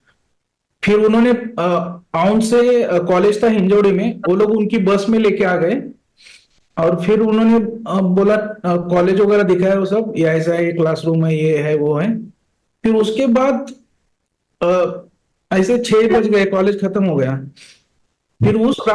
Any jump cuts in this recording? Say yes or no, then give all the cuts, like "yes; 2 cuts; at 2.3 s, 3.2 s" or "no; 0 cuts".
no; 0 cuts